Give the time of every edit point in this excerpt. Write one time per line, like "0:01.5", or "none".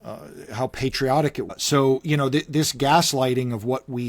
0:01.5

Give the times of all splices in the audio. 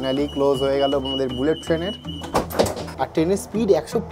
0:02.8

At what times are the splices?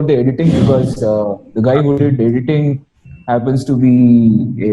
none

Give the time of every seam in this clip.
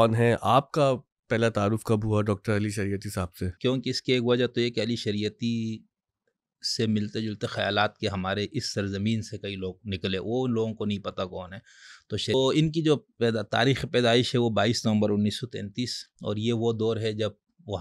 0:03.5
0:12.3

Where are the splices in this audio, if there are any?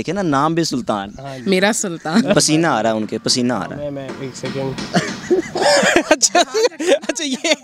0:02.3

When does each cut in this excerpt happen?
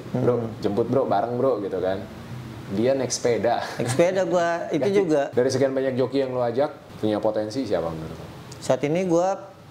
0:05.3
0:06.8

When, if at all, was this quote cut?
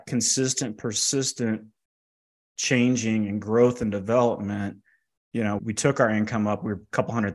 0:05.6

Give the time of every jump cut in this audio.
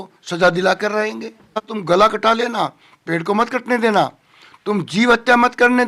0:01.7

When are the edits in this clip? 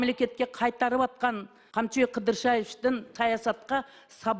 0:01.5
0:03.1

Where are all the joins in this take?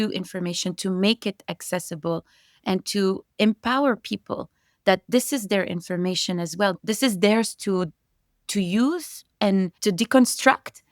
0:06.8
0:09.8

